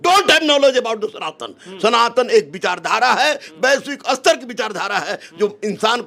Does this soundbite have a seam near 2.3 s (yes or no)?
no